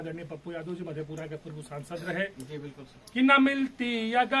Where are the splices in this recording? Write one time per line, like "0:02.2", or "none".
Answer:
0:02.8